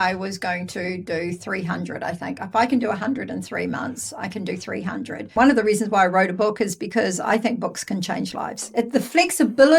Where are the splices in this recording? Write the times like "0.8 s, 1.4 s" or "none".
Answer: 5.3 s, 8.6 s